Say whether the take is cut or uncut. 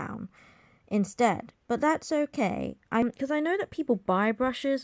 cut